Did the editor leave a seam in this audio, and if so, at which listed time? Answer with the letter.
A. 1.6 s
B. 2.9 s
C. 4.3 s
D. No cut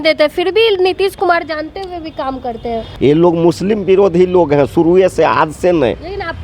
B